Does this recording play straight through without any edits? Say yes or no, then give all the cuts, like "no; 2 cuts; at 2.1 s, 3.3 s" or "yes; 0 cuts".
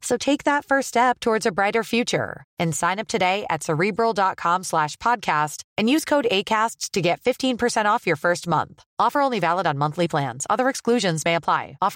yes; 0 cuts